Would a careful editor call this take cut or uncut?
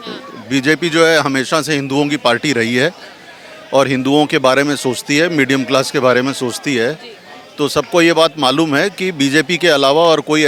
uncut